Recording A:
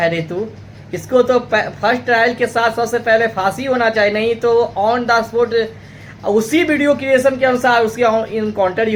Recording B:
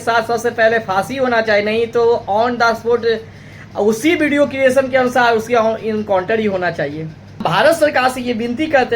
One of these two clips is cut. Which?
B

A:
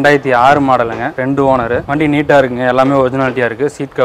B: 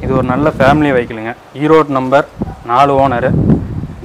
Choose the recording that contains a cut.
A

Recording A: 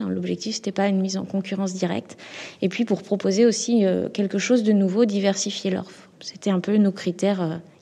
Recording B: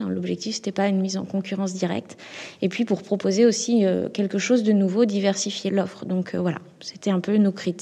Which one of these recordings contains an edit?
A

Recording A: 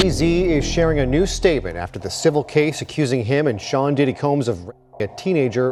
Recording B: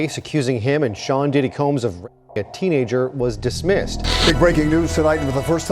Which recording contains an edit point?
B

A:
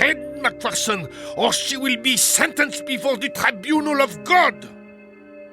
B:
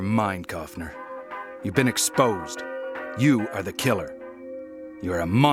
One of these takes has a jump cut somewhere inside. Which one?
A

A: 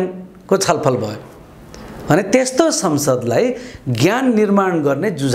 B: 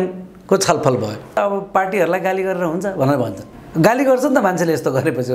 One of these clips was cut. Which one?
B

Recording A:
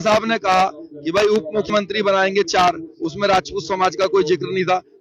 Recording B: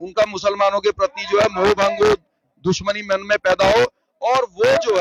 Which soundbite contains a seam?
A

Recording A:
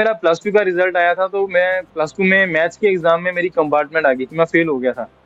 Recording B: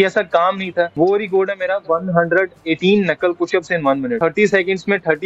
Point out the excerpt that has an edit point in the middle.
B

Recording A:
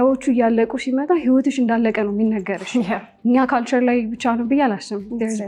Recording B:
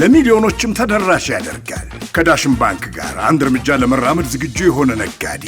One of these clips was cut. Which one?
A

